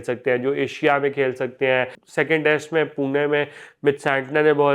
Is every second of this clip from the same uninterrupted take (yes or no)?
no